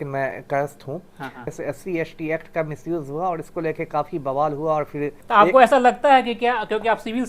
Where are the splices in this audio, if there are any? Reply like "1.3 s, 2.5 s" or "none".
1.5 s, 5.2 s